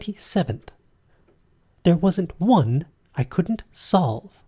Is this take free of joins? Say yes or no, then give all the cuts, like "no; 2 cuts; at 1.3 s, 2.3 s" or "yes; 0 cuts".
no; 1 cut; at 3.4 s